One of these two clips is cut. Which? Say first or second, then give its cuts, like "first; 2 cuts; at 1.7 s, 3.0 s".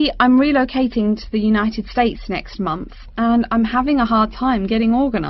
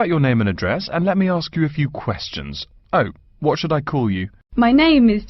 second; 1 cut; at 4.4 s